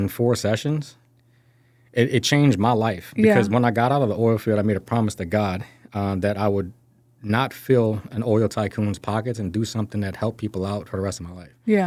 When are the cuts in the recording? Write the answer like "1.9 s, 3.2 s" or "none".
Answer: none